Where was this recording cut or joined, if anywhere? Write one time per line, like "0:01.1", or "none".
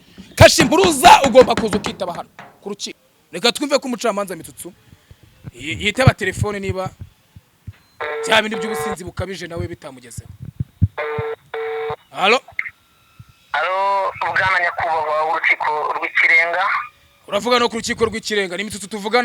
0:02.9
0:12.1